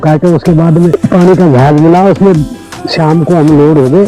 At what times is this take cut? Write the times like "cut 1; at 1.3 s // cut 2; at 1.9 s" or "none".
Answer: cut 1; at 1.0 s